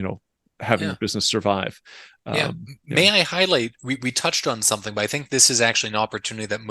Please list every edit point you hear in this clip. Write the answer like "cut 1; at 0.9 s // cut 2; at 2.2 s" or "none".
cut 1; at 2.4 s